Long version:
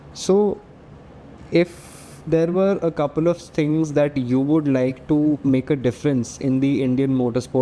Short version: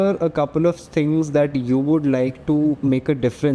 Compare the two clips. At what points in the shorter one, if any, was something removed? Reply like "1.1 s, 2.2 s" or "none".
none